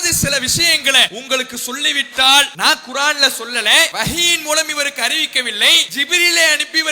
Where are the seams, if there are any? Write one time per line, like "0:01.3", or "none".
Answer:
0:01.1
0:02.5
0:03.9
0:05.9